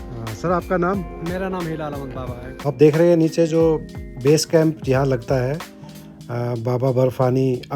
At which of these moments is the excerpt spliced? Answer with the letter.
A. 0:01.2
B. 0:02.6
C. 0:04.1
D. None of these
B